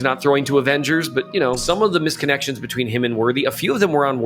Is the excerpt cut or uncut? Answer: cut